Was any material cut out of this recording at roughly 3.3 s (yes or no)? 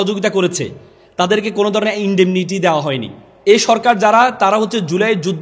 yes